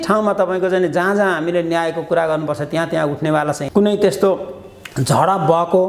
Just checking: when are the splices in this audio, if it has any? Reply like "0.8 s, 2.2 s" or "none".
3.6 s